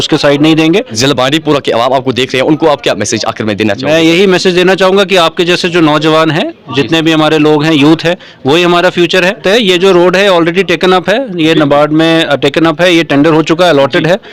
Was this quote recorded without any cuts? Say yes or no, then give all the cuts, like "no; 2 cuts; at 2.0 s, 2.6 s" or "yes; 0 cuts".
no; 2 cuts; at 0.9 s, 9.4 s